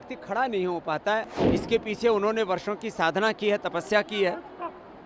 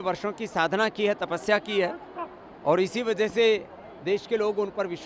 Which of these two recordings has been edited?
first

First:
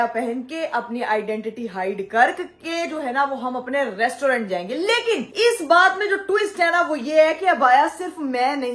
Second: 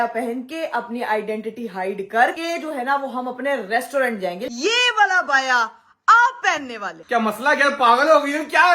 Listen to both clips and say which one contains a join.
second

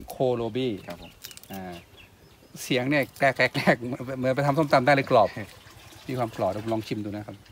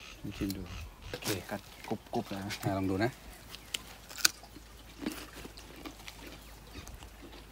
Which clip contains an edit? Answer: second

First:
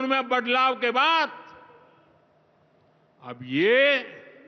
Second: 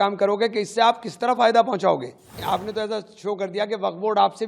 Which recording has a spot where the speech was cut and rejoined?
second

